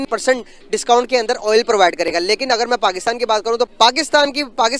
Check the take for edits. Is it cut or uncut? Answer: uncut